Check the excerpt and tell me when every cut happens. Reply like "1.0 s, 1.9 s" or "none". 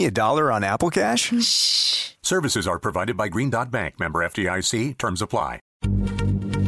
5.7 s

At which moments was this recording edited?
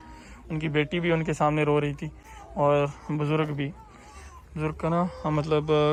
none

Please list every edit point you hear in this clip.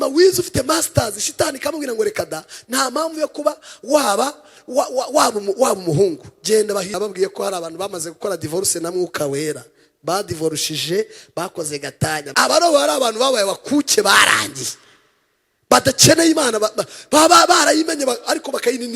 6.9 s, 12.3 s

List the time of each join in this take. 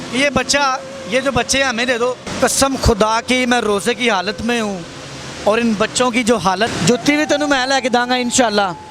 2.3 s, 6.7 s

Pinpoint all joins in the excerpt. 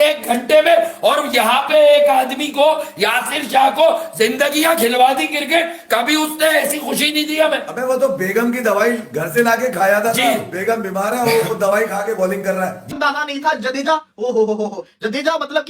12.8 s

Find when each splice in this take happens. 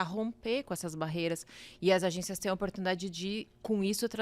none

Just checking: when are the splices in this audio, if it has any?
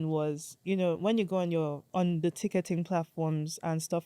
1.8 s

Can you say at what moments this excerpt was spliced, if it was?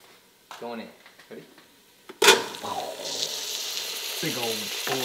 none

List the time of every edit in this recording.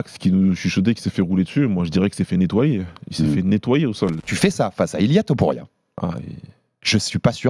4.2 s

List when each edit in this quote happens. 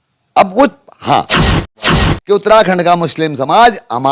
1.8 s

